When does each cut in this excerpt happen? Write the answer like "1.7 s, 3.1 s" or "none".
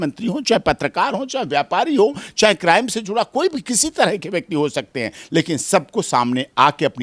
none